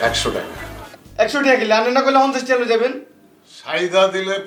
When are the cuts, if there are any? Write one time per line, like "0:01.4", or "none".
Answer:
none